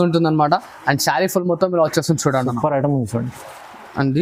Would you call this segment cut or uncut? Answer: uncut